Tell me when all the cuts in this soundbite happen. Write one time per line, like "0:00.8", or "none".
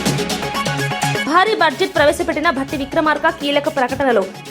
0:01.2